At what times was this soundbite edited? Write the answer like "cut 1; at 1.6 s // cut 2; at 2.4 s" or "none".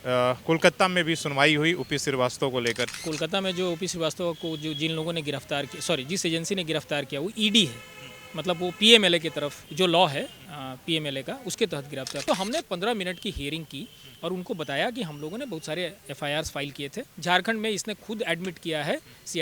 cut 1; at 2.9 s // cut 2; at 9.6 s // cut 3; at 12.2 s // cut 4; at 17.1 s